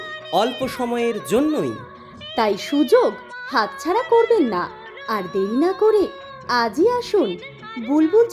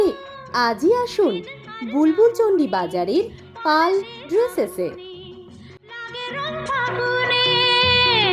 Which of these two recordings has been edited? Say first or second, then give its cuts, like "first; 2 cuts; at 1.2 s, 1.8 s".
second; 1 cut; at 4.9 s